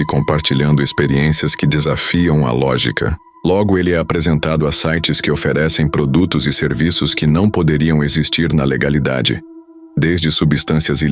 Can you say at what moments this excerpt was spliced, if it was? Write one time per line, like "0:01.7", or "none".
0:03.2